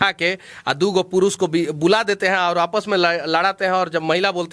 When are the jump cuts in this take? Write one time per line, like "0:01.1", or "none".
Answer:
none